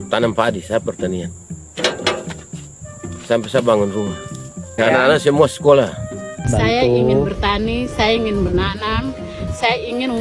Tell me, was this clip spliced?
yes; 2 cuts; at 4.7 s, 6.5 s

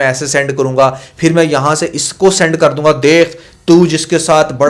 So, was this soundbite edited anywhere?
no; 0 cuts

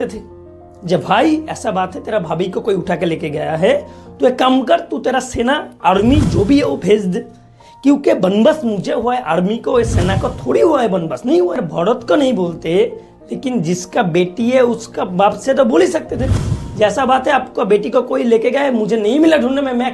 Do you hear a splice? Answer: yes; 1 cut; at 11.6 s

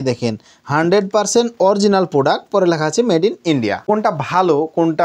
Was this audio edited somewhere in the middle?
yes; 1 cut; at 3.8 s

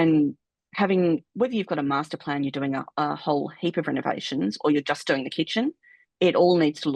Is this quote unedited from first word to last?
yes; 0 cuts

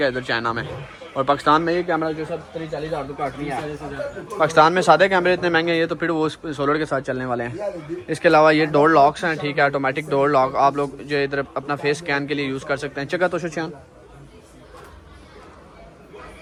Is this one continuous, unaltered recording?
yes; 0 cuts

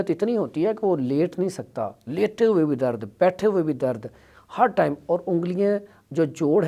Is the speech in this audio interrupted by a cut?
no; 0 cuts

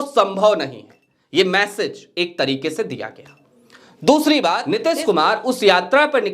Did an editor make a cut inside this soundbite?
yes; 1 cut; at 4.7 s

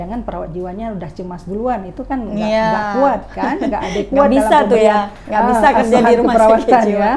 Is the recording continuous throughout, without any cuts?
yes; 0 cuts

